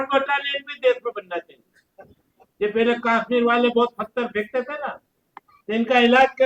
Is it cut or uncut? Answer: uncut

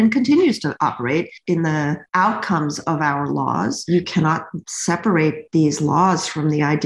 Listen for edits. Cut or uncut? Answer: cut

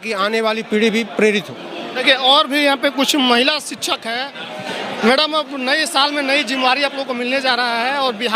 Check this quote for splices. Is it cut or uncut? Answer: uncut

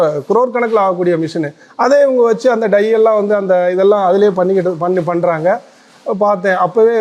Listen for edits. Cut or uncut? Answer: uncut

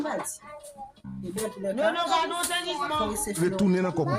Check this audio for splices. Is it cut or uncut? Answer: uncut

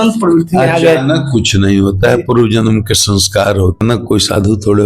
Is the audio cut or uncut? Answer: cut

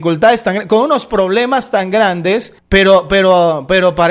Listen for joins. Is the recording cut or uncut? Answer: cut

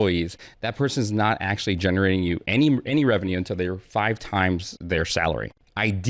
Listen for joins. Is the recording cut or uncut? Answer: uncut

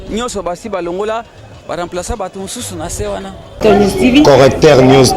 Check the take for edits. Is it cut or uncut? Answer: cut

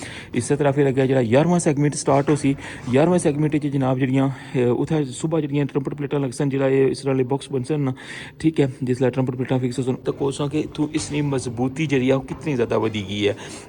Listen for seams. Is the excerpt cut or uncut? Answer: cut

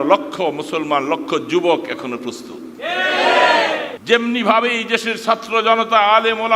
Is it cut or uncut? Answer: cut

